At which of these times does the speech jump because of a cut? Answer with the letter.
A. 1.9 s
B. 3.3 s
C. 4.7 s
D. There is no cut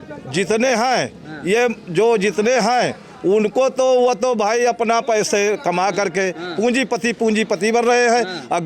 D